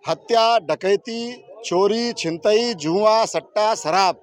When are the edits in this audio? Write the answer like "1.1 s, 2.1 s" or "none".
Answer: none